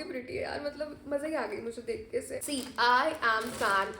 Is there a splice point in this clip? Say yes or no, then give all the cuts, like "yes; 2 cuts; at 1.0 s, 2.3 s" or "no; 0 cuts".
yes; 1 cut; at 2.4 s